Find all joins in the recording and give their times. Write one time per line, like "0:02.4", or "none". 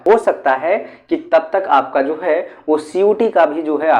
none